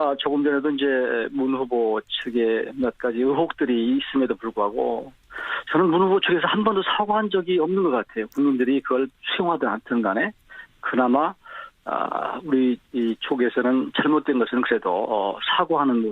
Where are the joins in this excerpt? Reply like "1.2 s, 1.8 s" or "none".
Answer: 10.7 s